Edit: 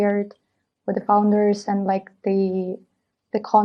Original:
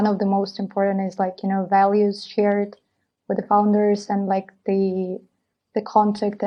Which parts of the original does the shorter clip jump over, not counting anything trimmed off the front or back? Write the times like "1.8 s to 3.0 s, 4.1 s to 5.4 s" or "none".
none